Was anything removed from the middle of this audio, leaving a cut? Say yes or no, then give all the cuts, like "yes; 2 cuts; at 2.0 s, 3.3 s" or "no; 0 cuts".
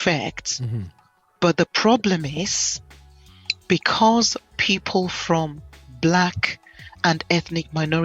no; 0 cuts